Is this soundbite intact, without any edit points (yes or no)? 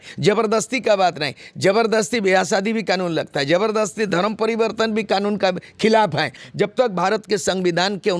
no